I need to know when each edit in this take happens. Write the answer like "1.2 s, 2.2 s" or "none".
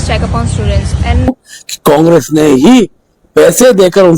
1.3 s